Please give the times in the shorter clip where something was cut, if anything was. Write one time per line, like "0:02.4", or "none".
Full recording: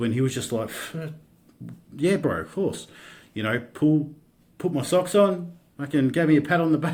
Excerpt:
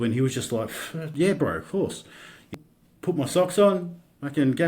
0:01.0
0:02.5